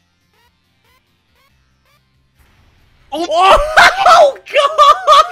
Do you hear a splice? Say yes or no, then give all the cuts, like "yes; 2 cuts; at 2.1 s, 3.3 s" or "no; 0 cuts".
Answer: no; 0 cuts